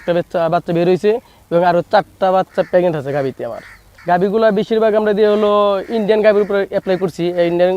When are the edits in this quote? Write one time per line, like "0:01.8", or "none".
0:03.9